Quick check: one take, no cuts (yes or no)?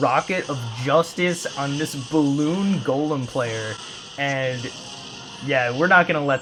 yes